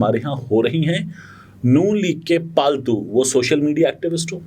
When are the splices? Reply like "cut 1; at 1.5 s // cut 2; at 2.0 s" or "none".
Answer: none